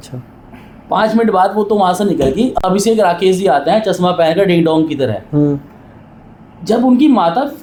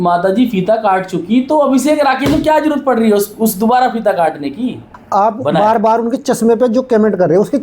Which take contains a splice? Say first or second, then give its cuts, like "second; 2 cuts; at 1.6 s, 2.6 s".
second; 1 cut; at 4.9 s